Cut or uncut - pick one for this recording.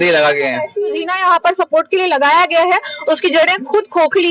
cut